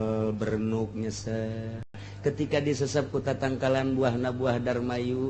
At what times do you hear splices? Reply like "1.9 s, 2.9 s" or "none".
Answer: 2.0 s